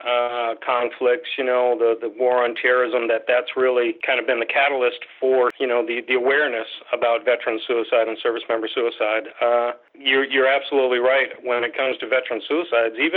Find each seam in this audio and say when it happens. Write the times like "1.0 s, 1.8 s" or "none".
4.0 s, 5.6 s, 9.9 s